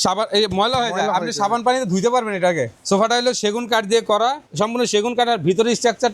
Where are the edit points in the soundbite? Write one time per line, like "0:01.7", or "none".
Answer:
0:02.8
0:04.4